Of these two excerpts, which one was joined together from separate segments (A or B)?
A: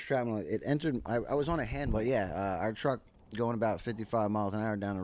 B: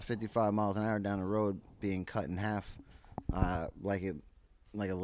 A